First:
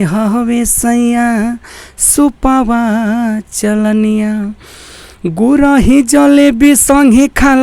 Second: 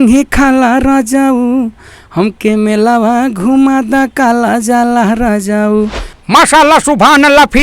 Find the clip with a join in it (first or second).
second